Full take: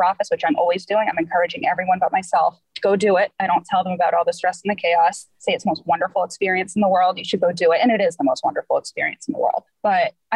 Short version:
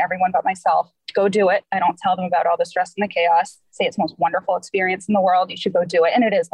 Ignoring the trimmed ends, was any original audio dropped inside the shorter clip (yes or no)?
no